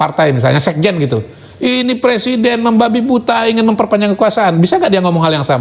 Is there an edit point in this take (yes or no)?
no